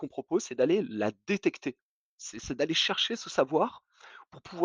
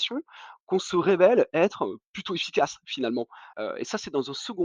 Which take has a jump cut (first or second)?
second